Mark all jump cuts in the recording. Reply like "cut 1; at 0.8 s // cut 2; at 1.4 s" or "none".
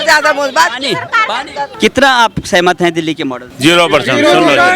cut 1; at 1.7 s // cut 2; at 3.4 s